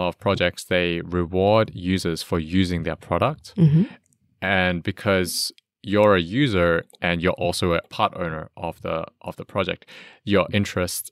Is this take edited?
no; 0 cuts

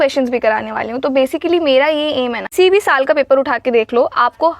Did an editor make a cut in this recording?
yes; 1 cut; at 2.5 s

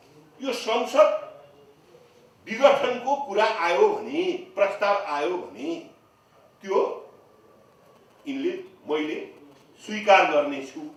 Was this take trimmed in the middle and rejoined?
no; 0 cuts

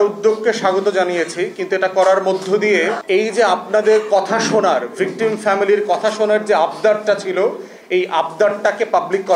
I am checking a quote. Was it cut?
no; 0 cuts

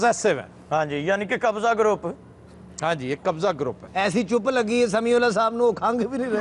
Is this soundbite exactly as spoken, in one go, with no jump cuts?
yes; 0 cuts

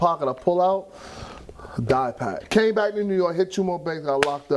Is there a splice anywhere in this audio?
yes; 1 cut; at 2.4 s

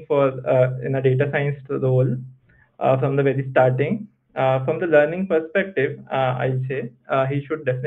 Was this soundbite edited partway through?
no; 0 cuts

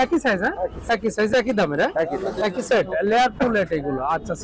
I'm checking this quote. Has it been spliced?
yes; 1 cut; at 2.7 s

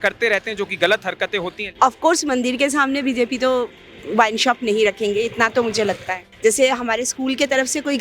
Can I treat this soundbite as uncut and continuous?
no; 2 cuts; at 1.7 s, 6.2 s

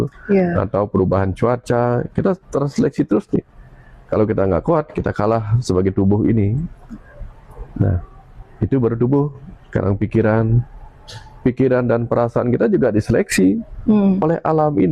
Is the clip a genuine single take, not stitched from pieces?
yes; 0 cuts

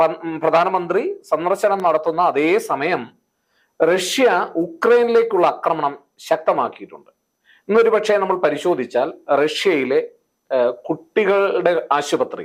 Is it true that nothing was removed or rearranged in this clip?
yes; 0 cuts

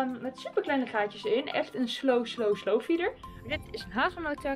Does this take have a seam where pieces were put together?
yes; 1 cut; at 3.3 s

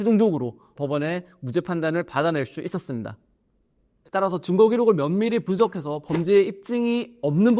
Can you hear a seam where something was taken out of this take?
no; 0 cuts

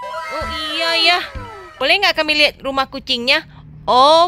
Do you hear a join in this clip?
yes; 1 cut; at 1.6 s

